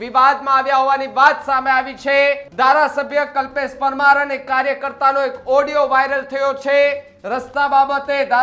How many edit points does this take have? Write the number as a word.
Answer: one